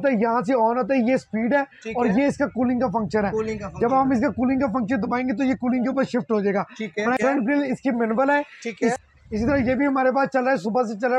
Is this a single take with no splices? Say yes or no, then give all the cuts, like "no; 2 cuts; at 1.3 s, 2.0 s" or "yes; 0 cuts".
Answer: no; 2 cuts; at 7.1 s, 8.9 s